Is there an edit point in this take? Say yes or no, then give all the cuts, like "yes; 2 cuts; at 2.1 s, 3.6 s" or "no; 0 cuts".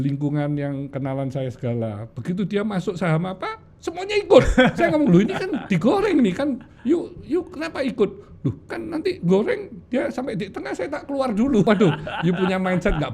yes; 1 cut; at 11.6 s